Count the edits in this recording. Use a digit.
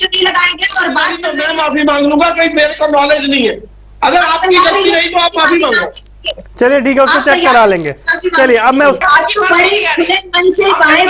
2